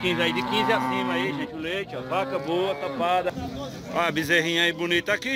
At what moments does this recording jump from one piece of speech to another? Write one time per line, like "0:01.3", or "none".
0:03.3

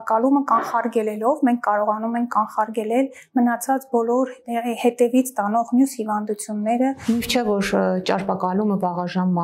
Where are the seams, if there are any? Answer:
0:07.0

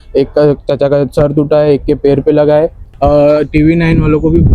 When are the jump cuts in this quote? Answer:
0:02.8

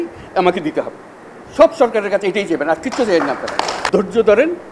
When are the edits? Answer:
0:03.8

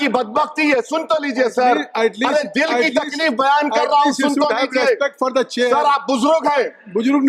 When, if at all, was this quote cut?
none

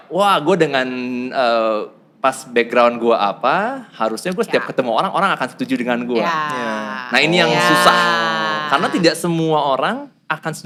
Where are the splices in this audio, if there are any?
none

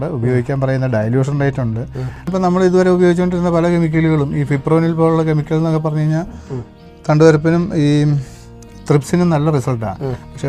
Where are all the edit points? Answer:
0:02.3

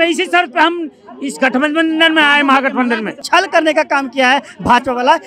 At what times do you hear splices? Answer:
0:03.2

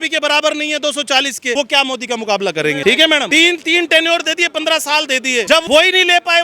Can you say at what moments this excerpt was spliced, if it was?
0:01.5
0:03.0
0:05.6

